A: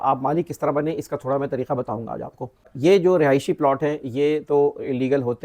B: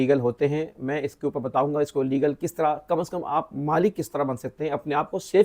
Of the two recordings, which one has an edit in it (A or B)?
A